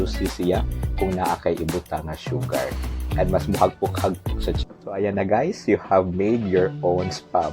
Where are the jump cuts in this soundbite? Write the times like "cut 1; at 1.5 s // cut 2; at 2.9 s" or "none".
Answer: cut 1; at 4.6 s